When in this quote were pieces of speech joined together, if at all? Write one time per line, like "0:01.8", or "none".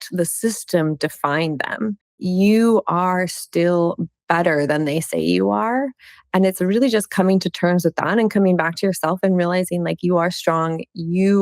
0:02.1